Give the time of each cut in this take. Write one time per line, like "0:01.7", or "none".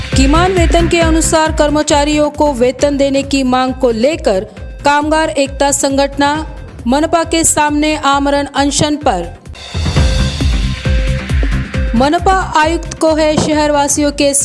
none